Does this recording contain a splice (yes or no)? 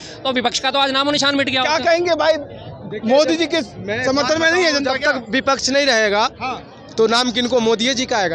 no